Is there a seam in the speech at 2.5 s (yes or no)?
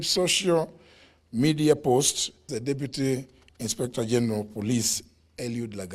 yes